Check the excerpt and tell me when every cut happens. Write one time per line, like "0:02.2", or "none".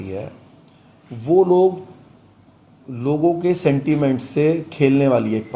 none